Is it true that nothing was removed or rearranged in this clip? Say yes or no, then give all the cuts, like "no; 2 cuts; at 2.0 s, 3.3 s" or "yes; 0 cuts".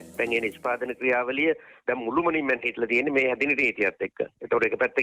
yes; 0 cuts